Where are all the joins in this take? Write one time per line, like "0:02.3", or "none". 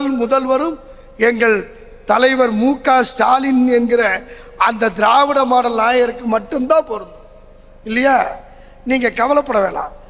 none